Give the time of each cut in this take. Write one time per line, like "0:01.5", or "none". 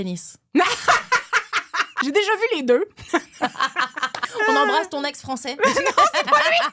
0:01.9
0:04.2